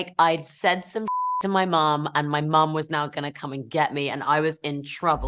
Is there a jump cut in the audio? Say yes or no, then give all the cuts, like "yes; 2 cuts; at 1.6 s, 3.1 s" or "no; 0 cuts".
no; 0 cuts